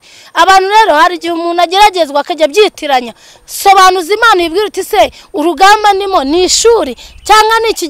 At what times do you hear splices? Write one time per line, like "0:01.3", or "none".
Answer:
none